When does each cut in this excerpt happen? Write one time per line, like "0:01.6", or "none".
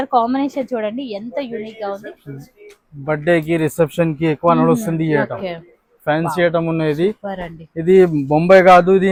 none